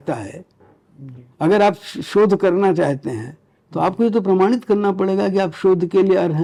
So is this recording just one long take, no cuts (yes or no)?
yes